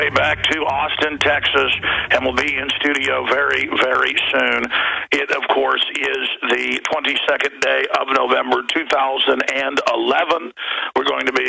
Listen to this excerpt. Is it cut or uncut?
cut